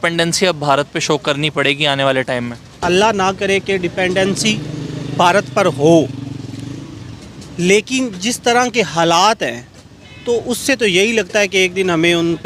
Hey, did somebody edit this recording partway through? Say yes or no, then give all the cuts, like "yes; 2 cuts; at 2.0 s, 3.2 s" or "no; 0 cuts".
yes; 1 cut; at 2.8 s